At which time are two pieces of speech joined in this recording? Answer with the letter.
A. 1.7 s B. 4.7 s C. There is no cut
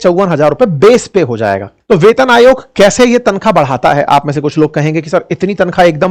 A